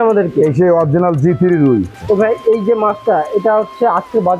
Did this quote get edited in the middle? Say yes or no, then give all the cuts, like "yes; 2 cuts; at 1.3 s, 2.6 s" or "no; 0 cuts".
yes; 1 cut; at 1.9 s